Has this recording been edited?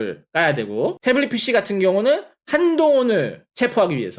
no; 0 cuts

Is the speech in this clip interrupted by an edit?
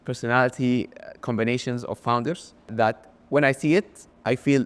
yes; 1 cut; at 2.7 s

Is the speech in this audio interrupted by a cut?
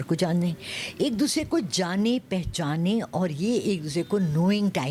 no; 0 cuts

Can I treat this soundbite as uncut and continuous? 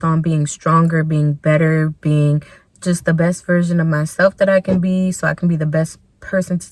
yes; 0 cuts

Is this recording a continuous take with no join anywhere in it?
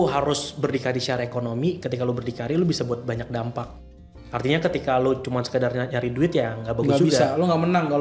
yes; 0 cuts

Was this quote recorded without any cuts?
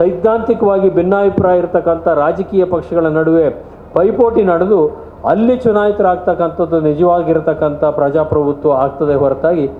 yes; 0 cuts

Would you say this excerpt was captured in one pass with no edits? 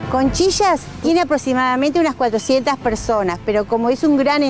no; 1 cut; at 0.9 s

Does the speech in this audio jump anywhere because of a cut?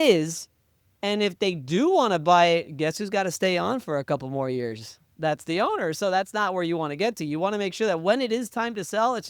yes; 1 cut; at 5.2 s

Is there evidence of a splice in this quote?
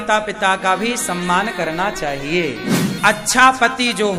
yes; 1 cut; at 2.9 s

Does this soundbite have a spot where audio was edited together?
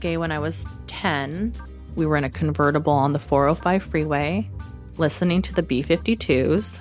no; 0 cuts

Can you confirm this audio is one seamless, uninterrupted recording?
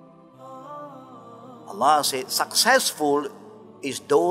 no; 1 cut; at 1.7 s

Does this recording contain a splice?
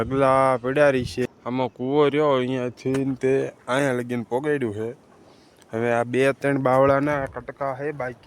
yes; 1 cut; at 1.3 s

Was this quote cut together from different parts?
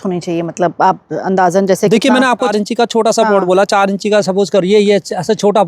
no; 0 cuts

